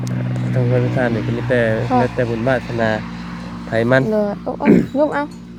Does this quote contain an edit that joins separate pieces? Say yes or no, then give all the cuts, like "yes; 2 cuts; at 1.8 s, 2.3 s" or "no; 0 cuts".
no; 0 cuts